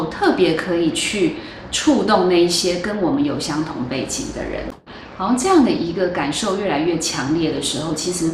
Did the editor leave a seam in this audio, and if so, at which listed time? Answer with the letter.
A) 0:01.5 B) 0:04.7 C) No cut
B